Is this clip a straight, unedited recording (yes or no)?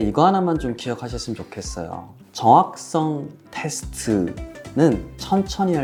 yes